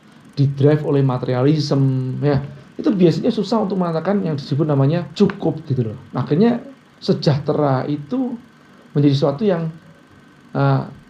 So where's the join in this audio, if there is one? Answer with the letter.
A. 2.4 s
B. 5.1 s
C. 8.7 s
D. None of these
B